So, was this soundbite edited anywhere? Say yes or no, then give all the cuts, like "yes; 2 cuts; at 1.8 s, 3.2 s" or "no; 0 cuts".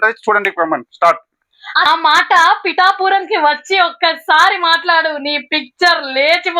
yes; 1 cut; at 1.9 s